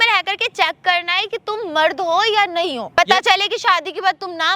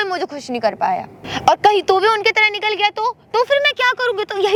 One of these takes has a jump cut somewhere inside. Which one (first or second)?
first